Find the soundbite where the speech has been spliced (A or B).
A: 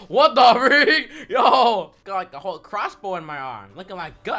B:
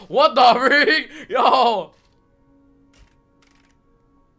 A